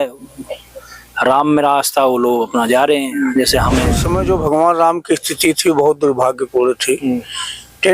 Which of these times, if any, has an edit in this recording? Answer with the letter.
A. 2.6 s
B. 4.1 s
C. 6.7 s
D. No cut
B